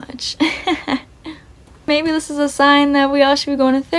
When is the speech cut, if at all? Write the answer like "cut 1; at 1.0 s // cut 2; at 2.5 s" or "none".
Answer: cut 1; at 1.9 s